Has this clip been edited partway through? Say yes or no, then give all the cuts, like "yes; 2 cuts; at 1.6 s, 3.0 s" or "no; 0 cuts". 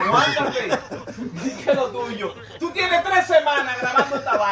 no; 0 cuts